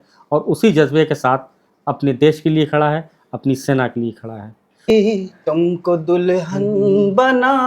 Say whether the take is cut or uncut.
cut